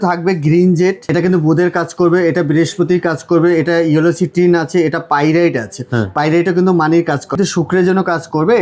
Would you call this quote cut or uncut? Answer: cut